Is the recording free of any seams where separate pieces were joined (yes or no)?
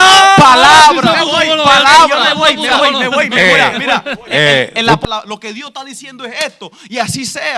no